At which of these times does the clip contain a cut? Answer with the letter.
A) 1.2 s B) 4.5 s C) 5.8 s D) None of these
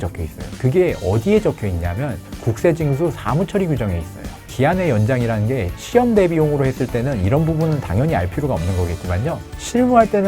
B